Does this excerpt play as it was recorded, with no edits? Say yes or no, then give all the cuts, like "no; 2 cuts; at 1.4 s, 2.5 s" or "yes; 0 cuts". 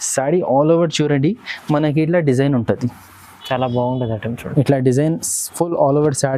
yes; 0 cuts